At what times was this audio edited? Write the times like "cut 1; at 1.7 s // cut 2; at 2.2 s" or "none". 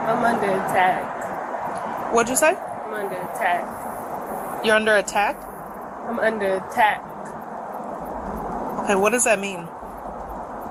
none